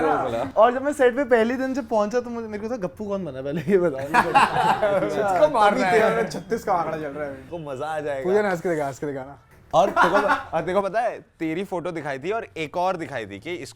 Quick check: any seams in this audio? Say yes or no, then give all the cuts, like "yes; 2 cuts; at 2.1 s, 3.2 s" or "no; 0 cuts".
yes; 1 cut; at 7.6 s